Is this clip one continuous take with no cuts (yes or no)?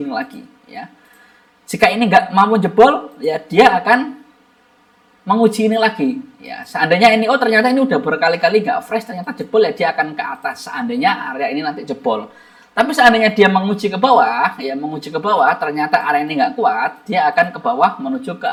yes